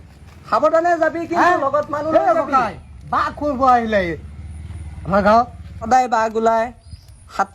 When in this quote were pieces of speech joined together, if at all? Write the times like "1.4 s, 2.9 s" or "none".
5.9 s